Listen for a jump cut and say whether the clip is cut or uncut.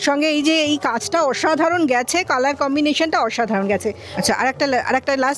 uncut